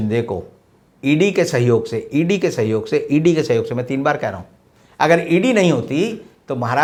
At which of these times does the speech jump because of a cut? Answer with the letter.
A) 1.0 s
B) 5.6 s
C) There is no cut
C